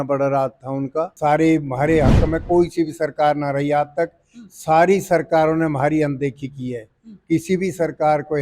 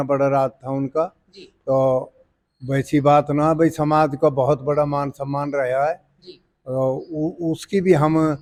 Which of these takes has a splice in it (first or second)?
first